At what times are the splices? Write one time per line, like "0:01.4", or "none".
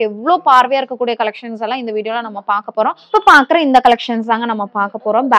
0:03.1